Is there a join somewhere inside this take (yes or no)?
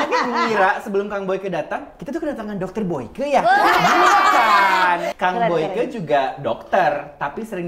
yes